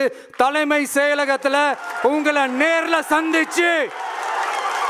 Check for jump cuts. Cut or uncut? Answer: uncut